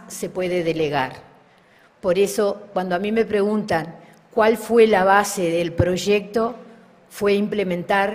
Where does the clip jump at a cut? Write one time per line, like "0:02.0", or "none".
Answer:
none